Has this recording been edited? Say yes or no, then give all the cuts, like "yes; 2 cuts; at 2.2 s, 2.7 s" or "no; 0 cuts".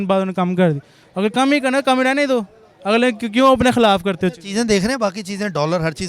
no; 0 cuts